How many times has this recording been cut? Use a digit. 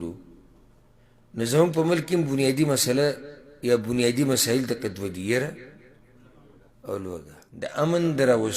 1